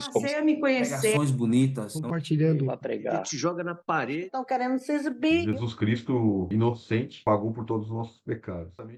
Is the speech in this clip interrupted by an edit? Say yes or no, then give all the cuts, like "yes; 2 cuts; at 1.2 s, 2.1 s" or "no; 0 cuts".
no; 0 cuts